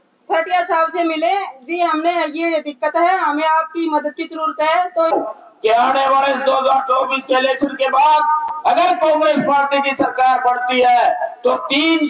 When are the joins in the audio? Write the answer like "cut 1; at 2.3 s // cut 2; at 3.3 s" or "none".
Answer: cut 1; at 5.1 s

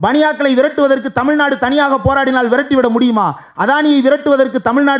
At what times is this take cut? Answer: none

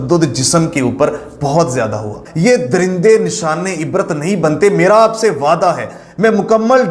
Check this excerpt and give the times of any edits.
cut 1; at 2.2 s

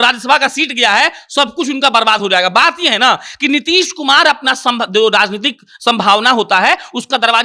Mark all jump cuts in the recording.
none

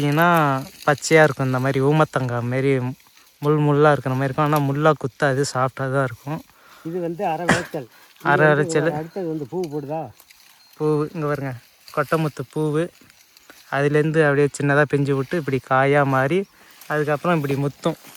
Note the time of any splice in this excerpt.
none

